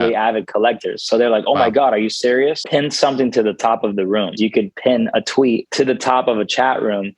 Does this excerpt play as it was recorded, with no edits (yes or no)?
no